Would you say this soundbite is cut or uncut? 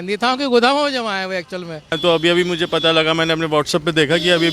cut